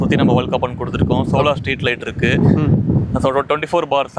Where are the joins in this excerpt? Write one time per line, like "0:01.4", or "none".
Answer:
none